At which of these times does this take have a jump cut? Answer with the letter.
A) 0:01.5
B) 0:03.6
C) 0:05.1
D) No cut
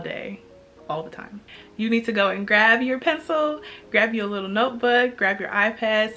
A